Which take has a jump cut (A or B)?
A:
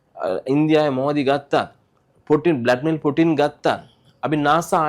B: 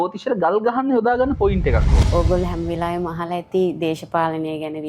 B